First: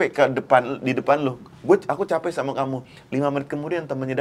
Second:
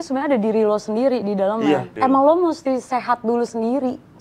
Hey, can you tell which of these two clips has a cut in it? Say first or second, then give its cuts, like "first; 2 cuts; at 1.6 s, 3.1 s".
second; 1 cut; at 1.9 s